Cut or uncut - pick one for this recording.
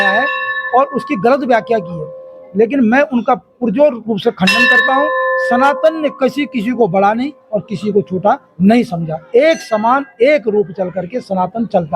uncut